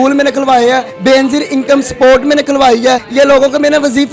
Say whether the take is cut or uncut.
cut